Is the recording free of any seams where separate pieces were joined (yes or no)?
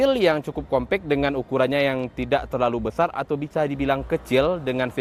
yes